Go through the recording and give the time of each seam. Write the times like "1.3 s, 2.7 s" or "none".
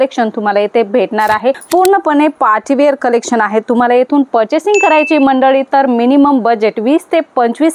1.5 s